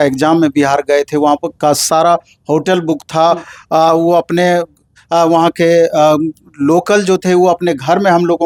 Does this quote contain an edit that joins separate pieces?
no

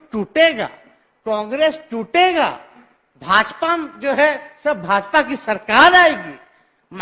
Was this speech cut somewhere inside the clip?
no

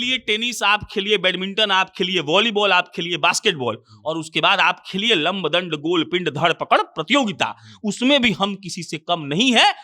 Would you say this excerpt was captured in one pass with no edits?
yes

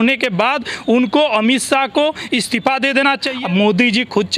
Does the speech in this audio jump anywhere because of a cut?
yes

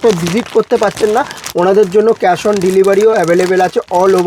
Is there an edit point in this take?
no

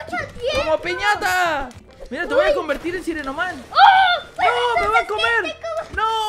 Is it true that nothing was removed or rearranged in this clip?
no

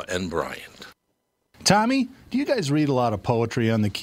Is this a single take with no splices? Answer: no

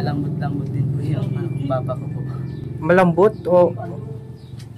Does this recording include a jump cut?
no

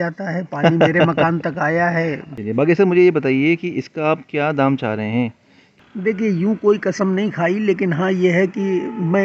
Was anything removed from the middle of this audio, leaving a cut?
yes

